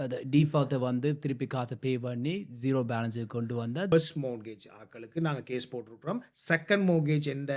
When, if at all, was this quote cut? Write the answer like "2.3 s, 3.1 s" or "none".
3.9 s